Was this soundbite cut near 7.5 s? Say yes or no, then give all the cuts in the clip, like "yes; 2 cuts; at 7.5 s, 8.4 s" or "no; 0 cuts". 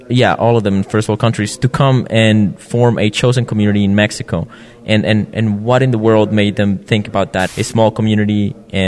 yes; 1 cut; at 7.5 s